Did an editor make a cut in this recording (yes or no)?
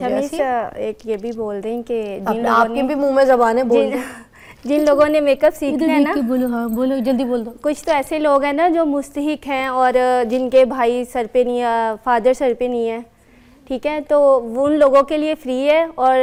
no